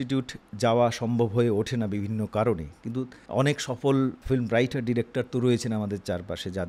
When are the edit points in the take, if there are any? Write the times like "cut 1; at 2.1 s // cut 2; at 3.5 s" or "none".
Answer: cut 1; at 3.2 s // cut 2; at 4.2 s